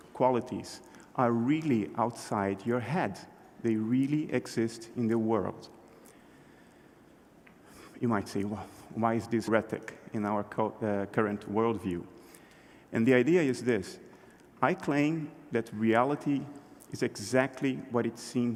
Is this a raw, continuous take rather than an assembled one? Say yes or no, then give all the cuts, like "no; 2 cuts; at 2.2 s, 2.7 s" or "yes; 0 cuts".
yes; 0 cuts